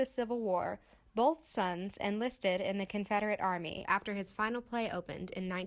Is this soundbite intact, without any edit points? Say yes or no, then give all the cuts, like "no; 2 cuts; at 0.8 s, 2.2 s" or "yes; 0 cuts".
no; 1 cut; at 3.8 s